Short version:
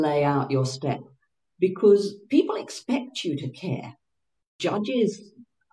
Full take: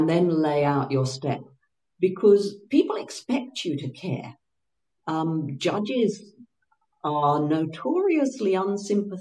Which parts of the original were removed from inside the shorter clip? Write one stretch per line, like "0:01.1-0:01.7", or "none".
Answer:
0:04.9-0:05.5